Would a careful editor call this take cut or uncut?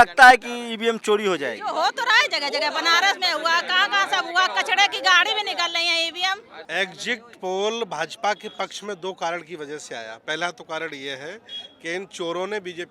cut